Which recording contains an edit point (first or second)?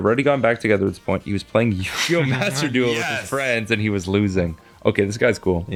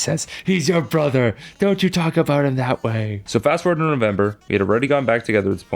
second